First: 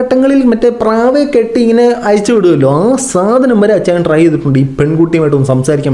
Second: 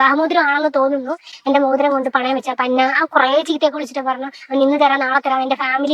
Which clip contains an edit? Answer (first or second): second